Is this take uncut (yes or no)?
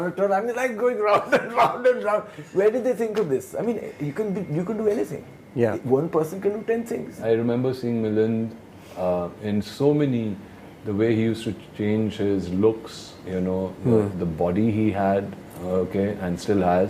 no